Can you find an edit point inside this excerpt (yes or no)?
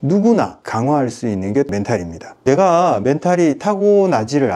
no